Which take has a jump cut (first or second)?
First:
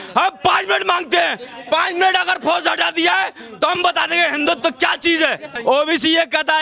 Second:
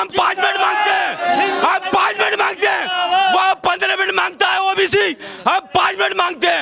first